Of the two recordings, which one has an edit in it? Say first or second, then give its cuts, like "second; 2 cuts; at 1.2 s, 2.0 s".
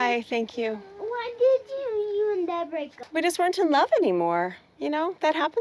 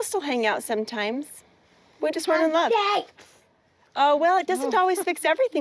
first; 1 cut; at 3.0 s